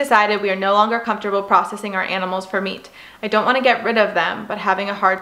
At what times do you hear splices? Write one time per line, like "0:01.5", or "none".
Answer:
none

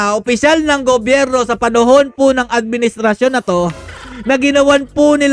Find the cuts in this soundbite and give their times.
none

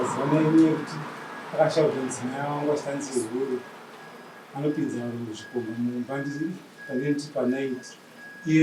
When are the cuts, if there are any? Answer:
none

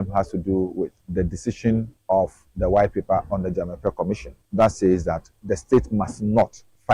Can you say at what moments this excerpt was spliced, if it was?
none

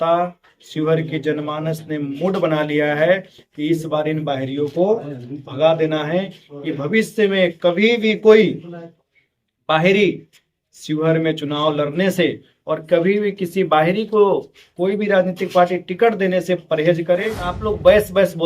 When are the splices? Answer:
0:17.5

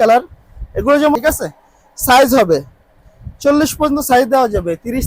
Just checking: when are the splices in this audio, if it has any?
0:01.1

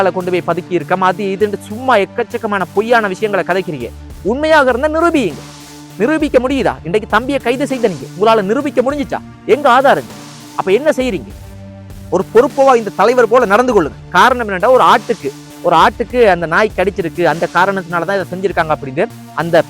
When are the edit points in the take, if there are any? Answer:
0:14.1

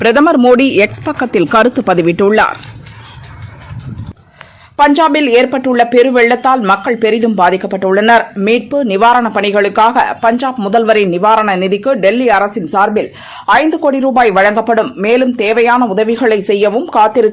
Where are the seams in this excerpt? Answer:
none

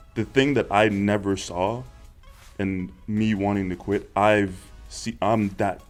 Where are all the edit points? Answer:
none

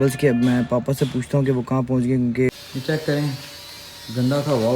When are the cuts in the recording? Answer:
0:02.5

